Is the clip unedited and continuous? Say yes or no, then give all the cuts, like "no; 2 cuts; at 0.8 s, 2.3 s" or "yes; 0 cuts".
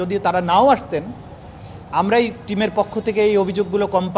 yes; 0 cuts